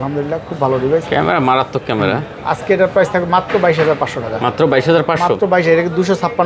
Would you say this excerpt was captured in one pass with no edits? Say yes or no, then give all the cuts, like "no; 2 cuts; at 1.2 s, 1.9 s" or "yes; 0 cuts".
yes; 0 cuts